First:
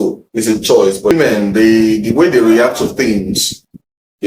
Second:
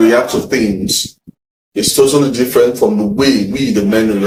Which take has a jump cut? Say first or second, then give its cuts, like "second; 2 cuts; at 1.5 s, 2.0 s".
first; 1 cut; at 1.1 s